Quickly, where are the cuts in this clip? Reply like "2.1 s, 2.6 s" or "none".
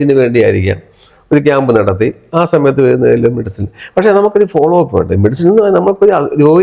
none